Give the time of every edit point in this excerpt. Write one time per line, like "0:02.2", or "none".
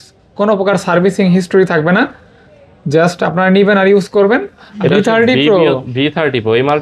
0:04.6